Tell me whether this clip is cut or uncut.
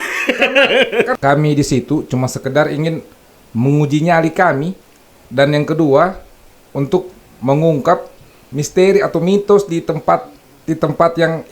cut